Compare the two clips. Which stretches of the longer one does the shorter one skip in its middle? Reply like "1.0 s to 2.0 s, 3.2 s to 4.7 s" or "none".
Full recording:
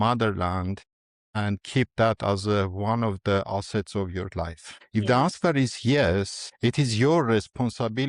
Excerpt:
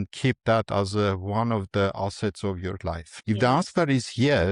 4.6 s to 4.8 s